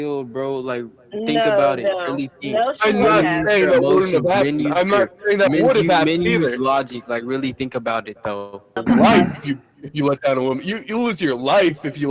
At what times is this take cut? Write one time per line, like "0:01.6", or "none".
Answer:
0:08.8